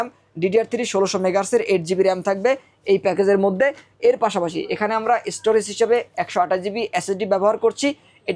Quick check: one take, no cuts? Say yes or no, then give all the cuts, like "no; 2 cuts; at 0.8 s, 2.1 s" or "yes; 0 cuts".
yes; 0 cuts